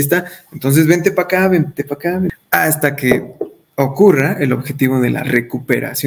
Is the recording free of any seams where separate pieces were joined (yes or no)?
no